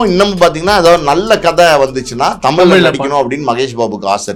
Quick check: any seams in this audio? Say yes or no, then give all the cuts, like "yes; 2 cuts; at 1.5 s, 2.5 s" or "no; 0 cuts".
no; 0 cuts